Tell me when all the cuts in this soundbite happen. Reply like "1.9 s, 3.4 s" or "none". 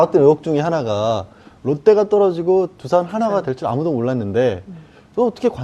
none